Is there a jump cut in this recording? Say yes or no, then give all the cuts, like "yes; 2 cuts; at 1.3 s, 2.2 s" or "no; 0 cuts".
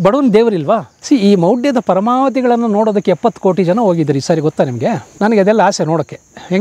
yes; 2 cuts; at 0.9 s, 5.1 s